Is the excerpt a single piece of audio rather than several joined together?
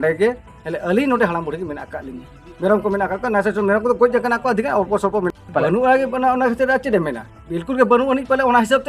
no; 1 cut; at 5.4 s

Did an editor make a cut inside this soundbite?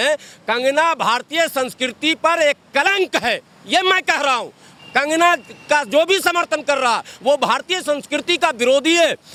no; 0 cuts

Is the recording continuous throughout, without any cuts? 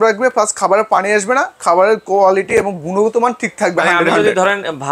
yes; 0 cuts

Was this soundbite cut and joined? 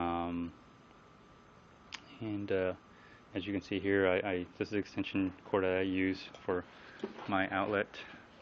yes; 1 cut; at 4.7 s

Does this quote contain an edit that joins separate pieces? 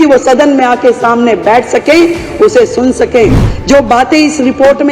yes; 1 cut; at 3.5 s

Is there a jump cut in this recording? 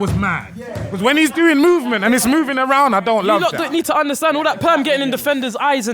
yes; 1 cut; at 3.4 s

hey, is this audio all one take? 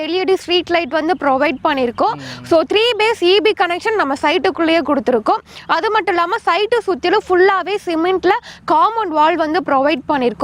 yes; 0 cuts

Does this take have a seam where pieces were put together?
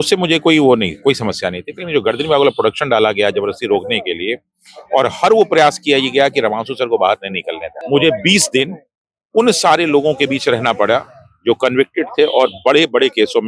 yes; 1 cut; at 7.7 s

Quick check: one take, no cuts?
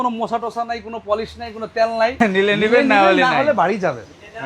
no; 1 cut; at 2.1 s

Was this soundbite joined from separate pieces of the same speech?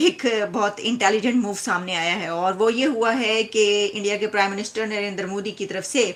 no; 0 cuts

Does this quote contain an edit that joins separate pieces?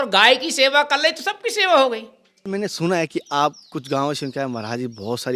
yes; 1 cut; at 2.5 s

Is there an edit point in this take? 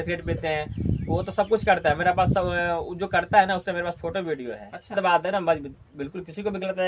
yes; 1 cut; at 4.9 s

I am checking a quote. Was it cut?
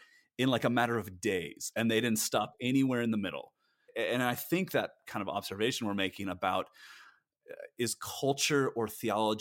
yes; 2 cuts; at 3.7 s, 5.0 s

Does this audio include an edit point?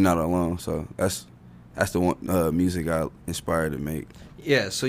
no; 0 cuts

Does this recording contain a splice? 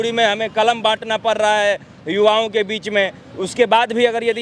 no; 0 cuts

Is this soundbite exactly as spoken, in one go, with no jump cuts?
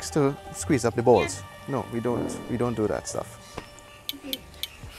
yes; 0 cuts

